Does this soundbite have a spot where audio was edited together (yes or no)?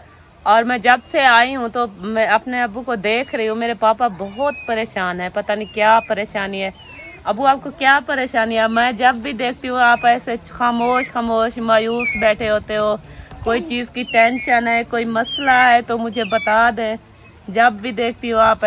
no